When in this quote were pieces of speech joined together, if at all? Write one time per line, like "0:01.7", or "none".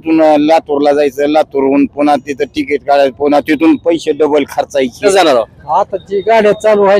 0:05.0